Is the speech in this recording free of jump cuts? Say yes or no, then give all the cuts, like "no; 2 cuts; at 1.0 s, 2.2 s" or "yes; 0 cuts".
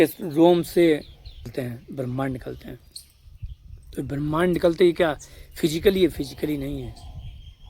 no; 1 cut; at 1.5 s